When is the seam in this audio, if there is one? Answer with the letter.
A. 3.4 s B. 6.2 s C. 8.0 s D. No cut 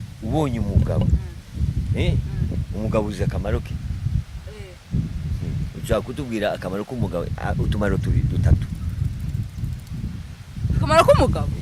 D